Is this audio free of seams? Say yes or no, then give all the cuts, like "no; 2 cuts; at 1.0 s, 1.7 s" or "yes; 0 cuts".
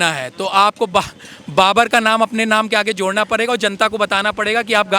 yes; 0 cuts